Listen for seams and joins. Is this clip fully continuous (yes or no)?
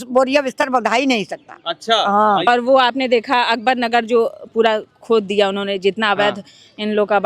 no